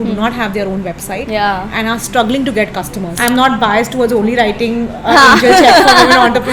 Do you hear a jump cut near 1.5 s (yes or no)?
no